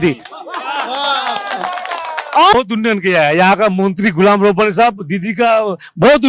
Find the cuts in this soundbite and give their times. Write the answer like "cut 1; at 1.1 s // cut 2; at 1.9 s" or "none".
cut 1; at 2.5 s